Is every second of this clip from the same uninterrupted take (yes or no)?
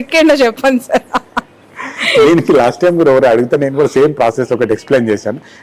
yes